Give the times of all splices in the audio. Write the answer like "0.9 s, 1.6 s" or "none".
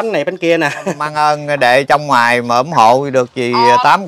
1.0 s

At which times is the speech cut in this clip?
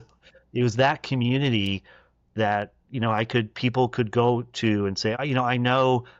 5.2 s

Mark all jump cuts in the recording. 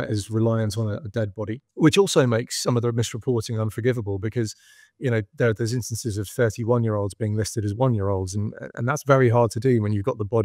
1.6 s

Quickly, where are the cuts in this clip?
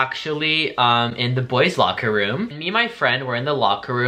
2.5 s

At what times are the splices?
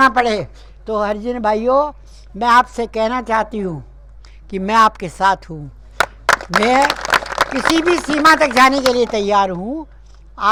none

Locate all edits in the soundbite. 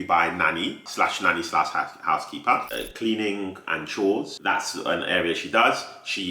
2.7 s, 4.3 s

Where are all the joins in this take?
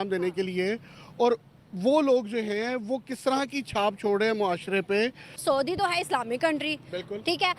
5.4 s

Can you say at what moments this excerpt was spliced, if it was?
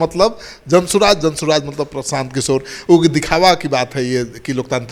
none

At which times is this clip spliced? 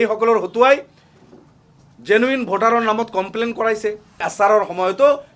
4.3 s

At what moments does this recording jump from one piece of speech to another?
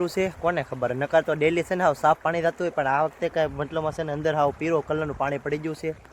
none

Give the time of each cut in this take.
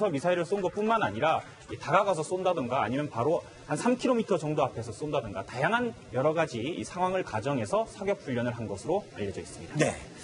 2.3 s

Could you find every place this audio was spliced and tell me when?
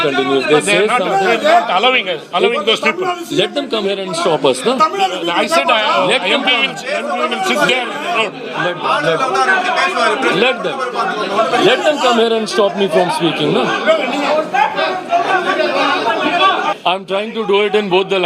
16.8 s

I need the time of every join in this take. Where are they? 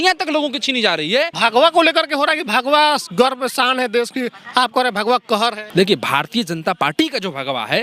1.3 s, 5.6 s

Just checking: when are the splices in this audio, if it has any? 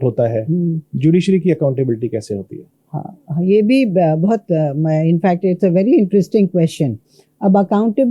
none

